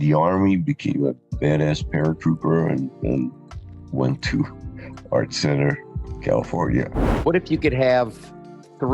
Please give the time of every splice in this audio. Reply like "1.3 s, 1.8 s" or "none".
7.0 s